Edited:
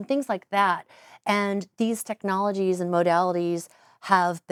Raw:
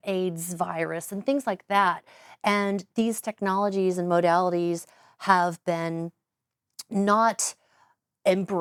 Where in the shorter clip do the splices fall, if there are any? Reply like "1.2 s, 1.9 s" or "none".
none